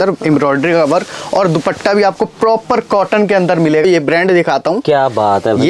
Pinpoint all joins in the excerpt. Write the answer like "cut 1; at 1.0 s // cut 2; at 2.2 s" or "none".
cut 1; at 3.8 s